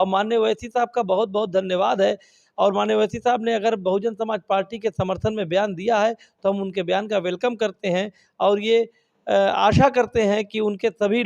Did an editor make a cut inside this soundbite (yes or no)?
no